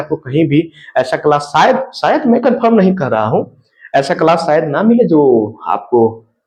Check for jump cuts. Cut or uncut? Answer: uncut